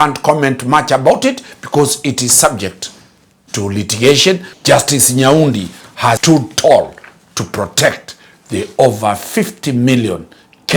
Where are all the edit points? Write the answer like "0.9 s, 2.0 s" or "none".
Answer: 4.5 s, 6.2 s